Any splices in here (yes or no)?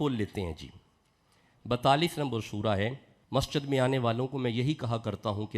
yes